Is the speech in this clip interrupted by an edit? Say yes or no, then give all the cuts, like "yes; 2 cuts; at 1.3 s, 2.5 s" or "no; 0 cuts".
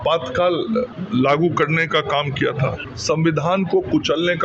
yes; 2 cuts; at 1.0 s, 2.9 s